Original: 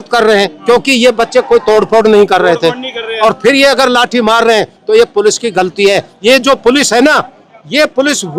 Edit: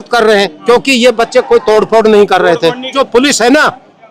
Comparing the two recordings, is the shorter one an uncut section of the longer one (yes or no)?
no